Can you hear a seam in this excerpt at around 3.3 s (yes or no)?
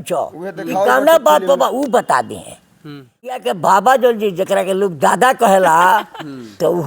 yes